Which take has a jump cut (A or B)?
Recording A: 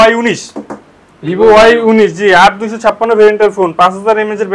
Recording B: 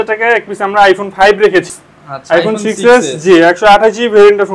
B